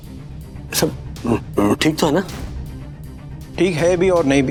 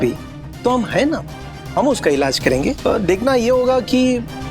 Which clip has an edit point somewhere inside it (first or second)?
second